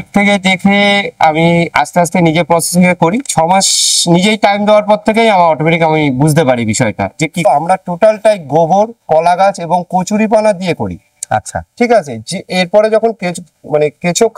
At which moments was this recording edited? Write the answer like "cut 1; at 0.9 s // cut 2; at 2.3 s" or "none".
cut 1; at 7.4 s